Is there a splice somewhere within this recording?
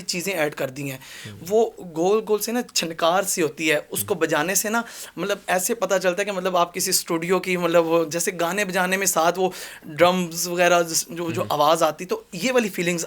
no; 0 cuts

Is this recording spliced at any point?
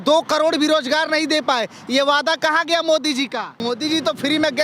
yes; 1 cut; at 3.6 s

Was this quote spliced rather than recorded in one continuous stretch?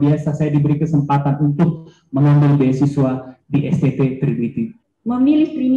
yes; 1 cut; at 4.8 s

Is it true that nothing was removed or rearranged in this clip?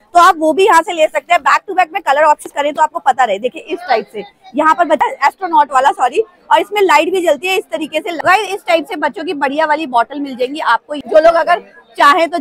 no; 4 cuts; at 2.5 s, 5.0 s, 8.2 s, 10.9 s

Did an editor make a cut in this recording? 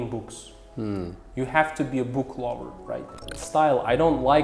yes; 1 cut; at 3.2 s

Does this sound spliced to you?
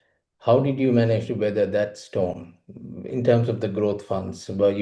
no; 0 cuts

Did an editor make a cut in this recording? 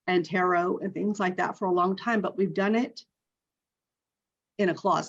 no; 0 cuts

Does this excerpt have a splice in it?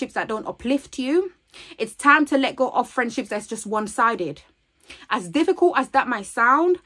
no; 0 cuts

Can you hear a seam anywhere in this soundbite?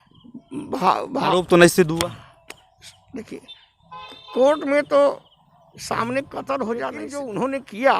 yes; 1 cut; at 7.0 s

